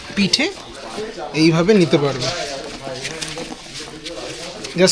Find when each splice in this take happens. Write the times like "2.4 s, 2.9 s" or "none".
none